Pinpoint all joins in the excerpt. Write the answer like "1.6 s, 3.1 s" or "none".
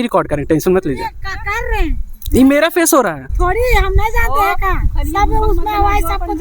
3.3 s